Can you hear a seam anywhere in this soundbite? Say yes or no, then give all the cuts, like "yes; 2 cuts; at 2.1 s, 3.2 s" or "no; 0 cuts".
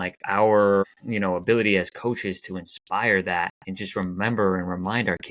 yes; 1 cut; at 1.0 s